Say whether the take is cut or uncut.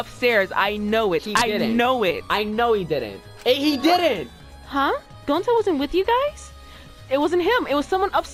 uncut